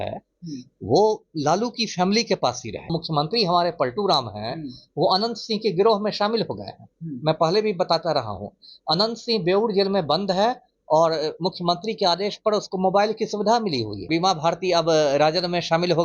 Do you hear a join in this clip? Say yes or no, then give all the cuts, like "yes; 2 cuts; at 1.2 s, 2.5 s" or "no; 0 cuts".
yes; 2 cuts; at 2.9 s, 14.1 s